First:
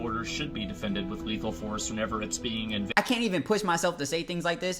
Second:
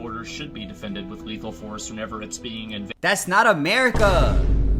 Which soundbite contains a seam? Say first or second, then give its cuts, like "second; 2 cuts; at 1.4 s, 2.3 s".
first; 1 cut; at 3.0 s